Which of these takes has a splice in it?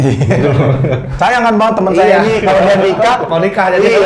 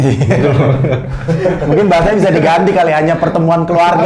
first; 1 cut; at 1.1 s

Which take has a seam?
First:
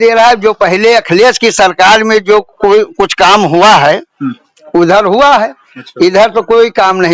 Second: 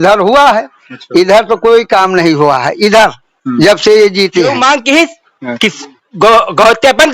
second; 1 cut; at 4.6 s

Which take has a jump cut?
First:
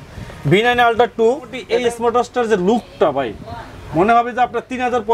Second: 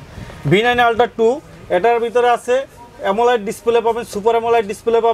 first; 1 cut; at 1.6 s

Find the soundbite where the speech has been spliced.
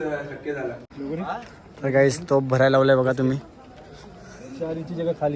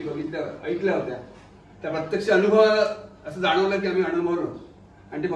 first; 1 cut; at 0.9 s

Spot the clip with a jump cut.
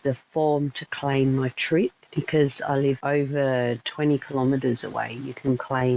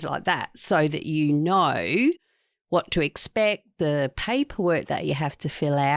first; 2 cuts; at 2.1 s, 3.0 s

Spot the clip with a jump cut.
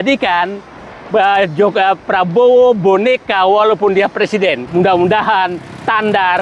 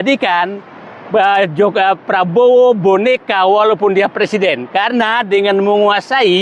first; 1 cut; at 4.6 s

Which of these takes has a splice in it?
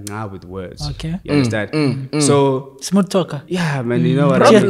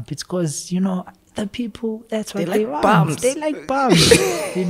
first; 1 cut; at 3.4 s

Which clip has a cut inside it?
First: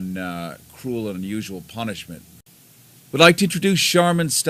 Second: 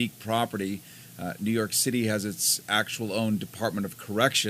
second; 1 cut; at 3.0 s

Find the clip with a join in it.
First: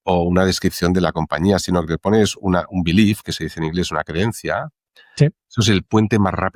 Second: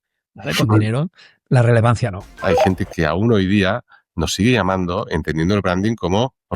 second; 1 cut; at 2.4 s

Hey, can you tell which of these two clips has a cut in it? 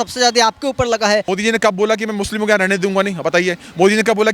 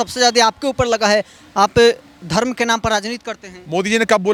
first; 1 cut; at 1.3 s

